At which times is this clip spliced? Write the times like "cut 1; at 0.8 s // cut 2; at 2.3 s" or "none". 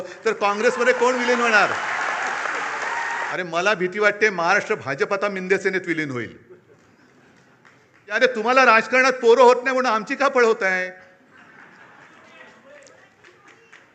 cut 1; at 3.3 s // cut 2; at 8.1 s